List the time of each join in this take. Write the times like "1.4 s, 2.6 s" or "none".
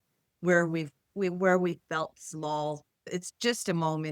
3.0 s